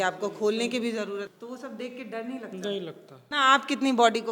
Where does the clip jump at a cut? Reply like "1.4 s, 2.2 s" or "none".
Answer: 1.3 s, 3.2 s